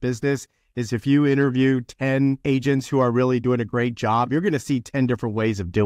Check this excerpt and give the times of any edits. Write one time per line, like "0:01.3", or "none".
0:02.4